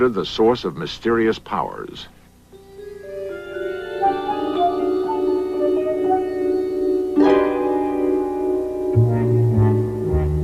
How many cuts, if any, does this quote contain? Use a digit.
1